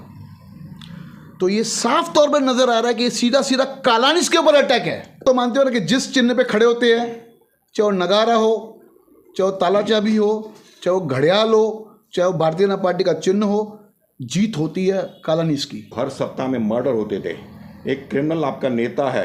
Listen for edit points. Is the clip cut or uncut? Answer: cut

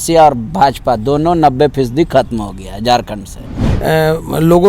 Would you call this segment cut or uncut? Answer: cut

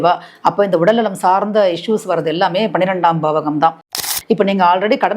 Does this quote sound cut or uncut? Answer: cut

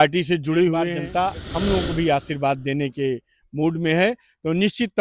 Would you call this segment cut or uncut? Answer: cut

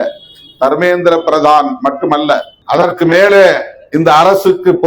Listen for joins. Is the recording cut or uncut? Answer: cut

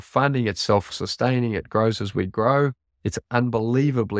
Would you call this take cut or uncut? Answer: cut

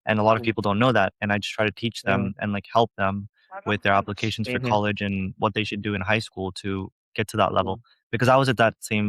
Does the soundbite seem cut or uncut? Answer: uncut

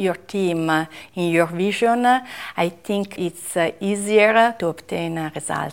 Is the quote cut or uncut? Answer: cut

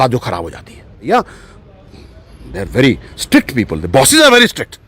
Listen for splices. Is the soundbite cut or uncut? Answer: cut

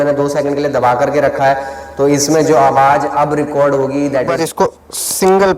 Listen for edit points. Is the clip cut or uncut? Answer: cut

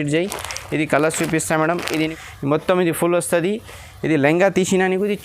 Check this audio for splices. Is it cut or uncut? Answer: cut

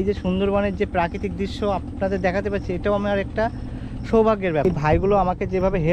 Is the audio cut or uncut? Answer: cut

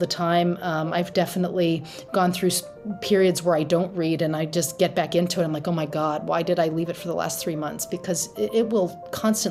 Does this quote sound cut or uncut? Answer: uncut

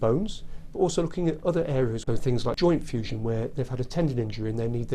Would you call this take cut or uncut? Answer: cut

